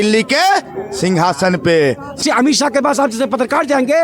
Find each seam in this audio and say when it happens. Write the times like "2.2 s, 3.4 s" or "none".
2.2 s